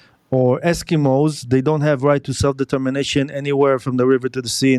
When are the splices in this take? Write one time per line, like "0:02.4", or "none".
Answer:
none